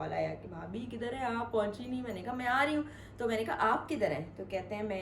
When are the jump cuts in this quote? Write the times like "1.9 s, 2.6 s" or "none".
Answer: none